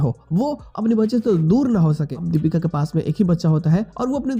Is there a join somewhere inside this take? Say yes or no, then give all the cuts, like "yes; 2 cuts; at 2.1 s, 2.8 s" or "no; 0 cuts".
yes; 1 cut; at 2.1 s